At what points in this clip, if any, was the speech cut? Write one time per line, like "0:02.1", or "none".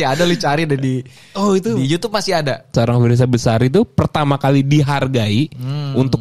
0:02.7